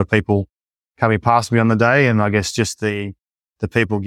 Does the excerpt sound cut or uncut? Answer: uncut